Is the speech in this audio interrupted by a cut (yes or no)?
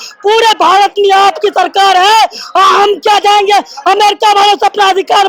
no